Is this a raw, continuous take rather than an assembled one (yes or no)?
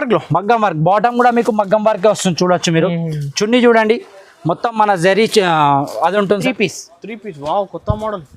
no